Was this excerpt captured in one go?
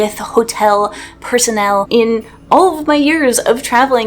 no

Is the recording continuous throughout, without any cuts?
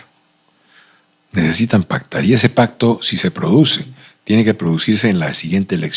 yes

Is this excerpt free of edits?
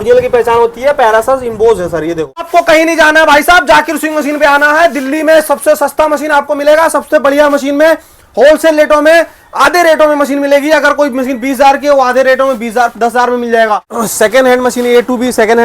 no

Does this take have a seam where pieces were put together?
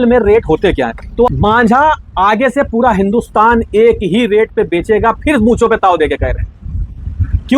yes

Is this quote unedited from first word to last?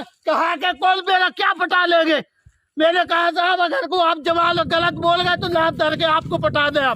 yes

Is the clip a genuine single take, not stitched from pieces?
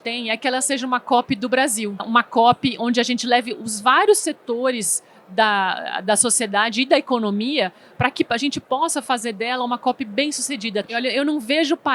no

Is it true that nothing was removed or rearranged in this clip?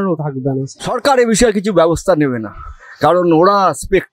no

